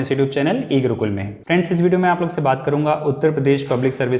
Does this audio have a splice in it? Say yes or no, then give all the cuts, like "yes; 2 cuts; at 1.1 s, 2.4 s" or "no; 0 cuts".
yes; 1 cut; at 1.3 s